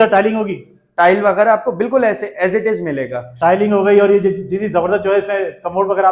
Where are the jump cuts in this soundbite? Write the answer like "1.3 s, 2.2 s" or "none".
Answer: none